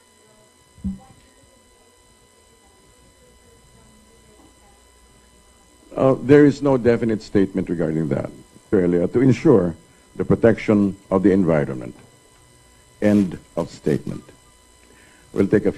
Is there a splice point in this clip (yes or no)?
no